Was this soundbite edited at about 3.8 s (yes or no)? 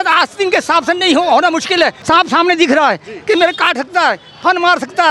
no